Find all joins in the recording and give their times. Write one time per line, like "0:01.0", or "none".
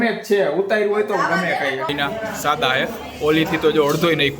0:01.9